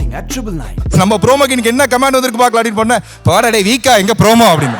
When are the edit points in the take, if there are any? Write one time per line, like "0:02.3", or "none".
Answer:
0:00.9